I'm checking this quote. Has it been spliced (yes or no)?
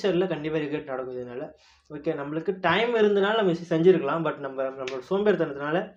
no